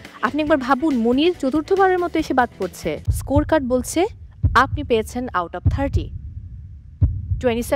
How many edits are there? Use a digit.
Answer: 1